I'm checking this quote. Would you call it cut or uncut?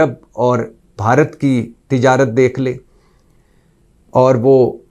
uncut